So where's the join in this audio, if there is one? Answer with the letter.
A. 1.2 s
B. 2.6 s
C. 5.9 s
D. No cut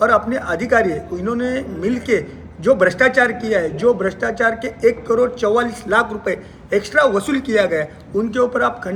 D